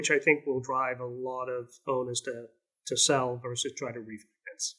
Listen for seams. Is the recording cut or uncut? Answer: cut